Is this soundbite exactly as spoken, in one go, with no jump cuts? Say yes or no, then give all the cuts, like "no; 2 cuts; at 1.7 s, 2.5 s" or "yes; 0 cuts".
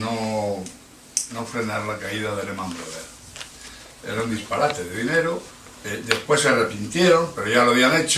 no; 1 cut; at 4.1 s